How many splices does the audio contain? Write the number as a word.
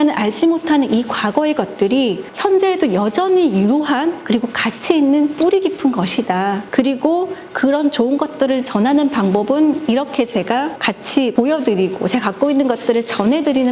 three